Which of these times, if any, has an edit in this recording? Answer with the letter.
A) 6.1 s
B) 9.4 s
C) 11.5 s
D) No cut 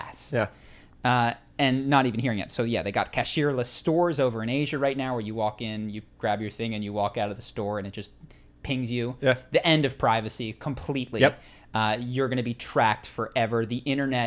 D